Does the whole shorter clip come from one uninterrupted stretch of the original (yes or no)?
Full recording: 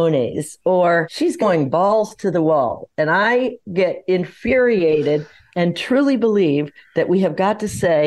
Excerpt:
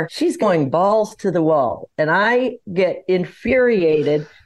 yes